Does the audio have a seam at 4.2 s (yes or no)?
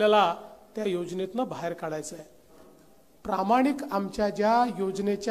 no